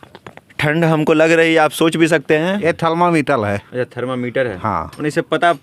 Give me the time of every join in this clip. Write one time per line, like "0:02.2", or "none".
0:02.6